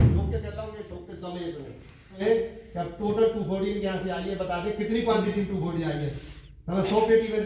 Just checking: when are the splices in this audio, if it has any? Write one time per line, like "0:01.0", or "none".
0:02.2

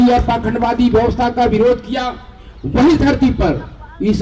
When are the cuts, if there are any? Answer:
none

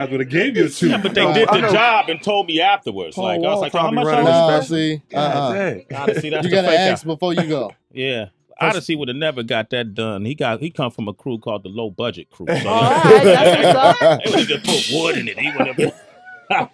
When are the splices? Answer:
none

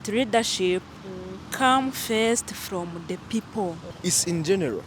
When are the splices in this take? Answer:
0:03.9

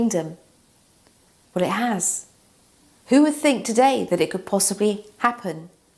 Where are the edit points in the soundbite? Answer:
none

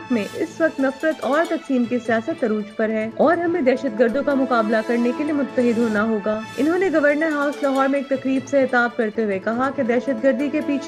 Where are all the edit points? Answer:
none

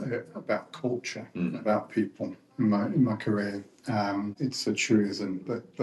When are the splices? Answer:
0:04.3

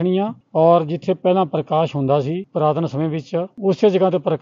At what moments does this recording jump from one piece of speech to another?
0:03.5

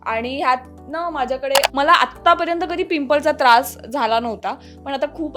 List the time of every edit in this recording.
0:01.7

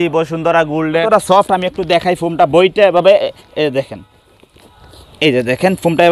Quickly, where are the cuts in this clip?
0:01.1

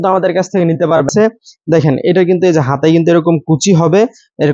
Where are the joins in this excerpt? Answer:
0:01.1

